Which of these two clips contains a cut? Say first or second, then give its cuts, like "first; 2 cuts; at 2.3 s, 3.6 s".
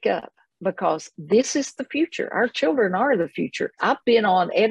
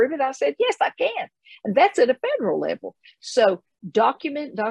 first; 1 cut; at 3.8 s